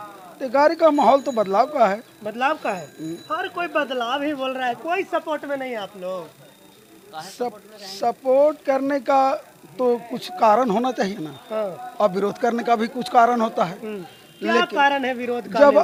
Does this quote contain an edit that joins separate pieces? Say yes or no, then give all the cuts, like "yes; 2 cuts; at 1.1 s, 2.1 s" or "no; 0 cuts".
no; 0 cuts